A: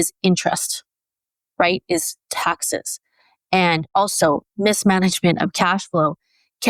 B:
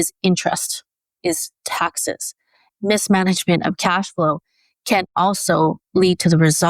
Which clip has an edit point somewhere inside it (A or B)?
B